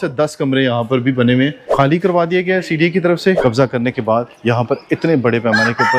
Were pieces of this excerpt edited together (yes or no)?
yes